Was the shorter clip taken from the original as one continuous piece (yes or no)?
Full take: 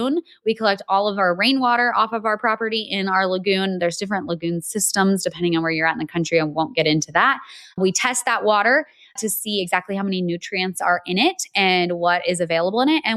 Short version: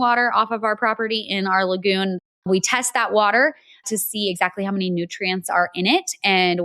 no